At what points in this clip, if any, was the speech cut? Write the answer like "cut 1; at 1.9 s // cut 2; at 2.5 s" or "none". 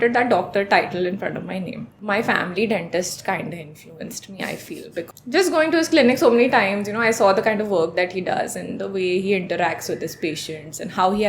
cut 1; at 1.9 s // cut 2; at 5.1 s

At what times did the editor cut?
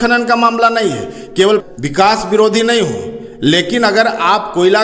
cut 1; at 1.6 s

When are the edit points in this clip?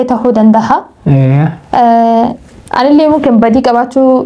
none

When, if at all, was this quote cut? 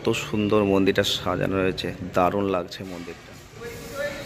cut 1; at 2.9 s

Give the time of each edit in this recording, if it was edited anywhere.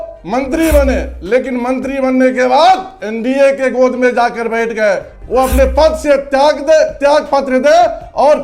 cut 1; at 5.1 s

